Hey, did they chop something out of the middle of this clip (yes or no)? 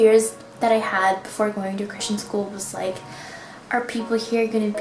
no